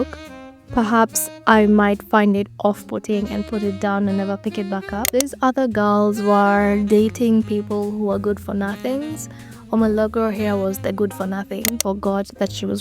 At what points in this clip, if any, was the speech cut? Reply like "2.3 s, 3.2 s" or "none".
5.1 s, 11.9 s

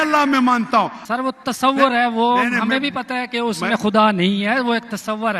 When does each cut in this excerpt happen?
1.0 s

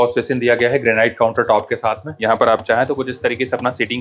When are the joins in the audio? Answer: 2.1 s

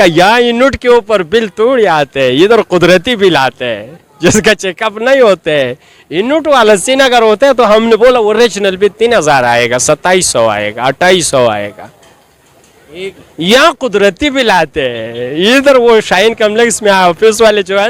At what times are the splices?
none

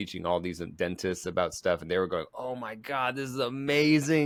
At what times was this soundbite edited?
none

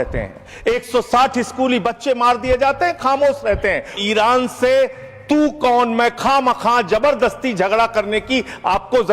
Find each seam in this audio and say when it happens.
4.0 s

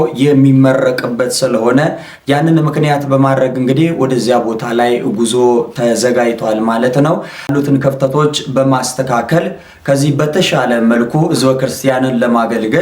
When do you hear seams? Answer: 7.5 s

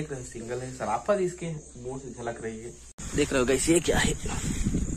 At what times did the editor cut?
3.0 s

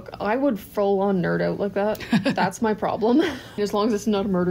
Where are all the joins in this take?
3.6 s

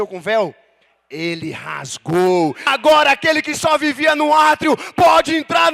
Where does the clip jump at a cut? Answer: 2.7 s

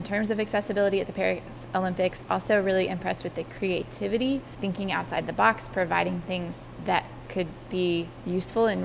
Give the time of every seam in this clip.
none

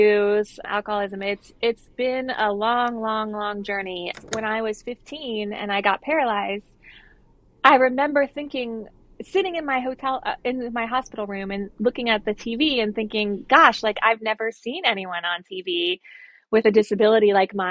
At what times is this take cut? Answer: 4.1 s

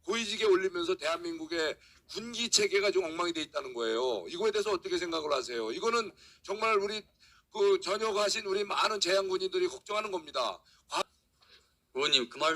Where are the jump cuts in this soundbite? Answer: 11.0 s

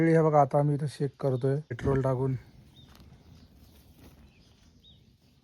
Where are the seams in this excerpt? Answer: 1.7 s

